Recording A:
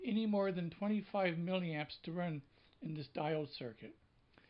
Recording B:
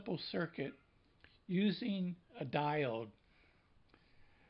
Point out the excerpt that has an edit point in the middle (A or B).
A